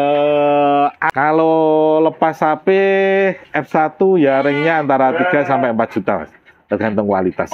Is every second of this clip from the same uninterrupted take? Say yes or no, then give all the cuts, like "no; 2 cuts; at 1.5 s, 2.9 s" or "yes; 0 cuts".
no; 1 cut; at 1.0 s